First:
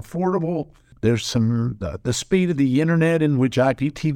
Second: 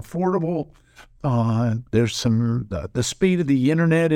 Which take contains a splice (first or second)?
first